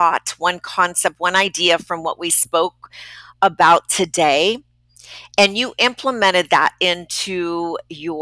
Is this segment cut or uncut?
uncut